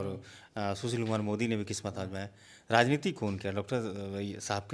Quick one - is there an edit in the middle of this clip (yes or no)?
no